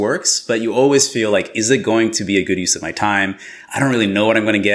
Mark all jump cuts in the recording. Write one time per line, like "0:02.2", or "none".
none